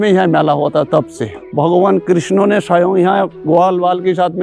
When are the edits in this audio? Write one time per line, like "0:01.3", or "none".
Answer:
0:01.5